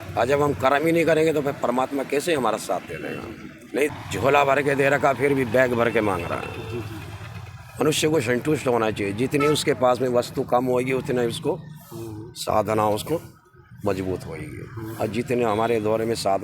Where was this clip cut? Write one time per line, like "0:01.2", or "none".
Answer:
0:03.9